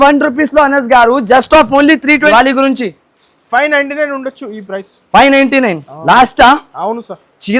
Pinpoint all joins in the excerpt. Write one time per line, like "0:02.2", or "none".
0:02.3